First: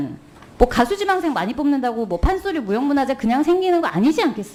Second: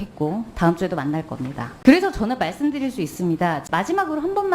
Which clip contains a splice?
second; 2 cuts; at 1.6 s, 3.6 s

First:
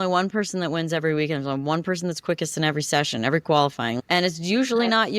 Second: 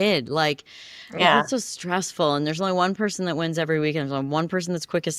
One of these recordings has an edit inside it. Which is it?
first; 1 cut; at 4.0 s

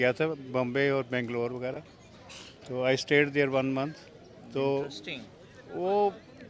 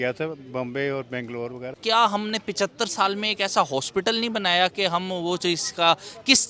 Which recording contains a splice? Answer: second; 1 cut; at 1.8 s

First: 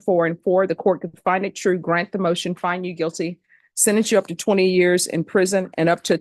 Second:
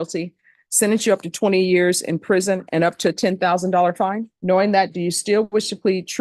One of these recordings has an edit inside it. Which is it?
second; 1 cut; at 4.3 s

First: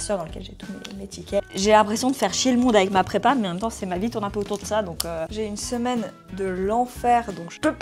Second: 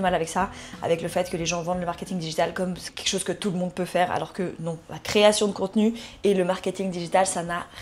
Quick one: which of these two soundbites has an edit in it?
first; 2 cuts; at 1.4 s, 5.3 s

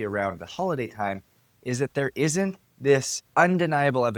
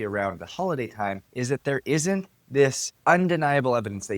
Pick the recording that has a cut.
second; 1 cut; at 1.2 s

